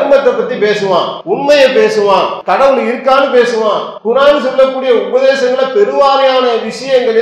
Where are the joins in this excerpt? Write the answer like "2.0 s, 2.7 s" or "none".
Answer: 1.2 s, 2.4 s, 3.9 s